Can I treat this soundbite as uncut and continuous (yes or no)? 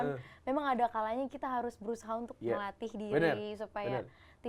yes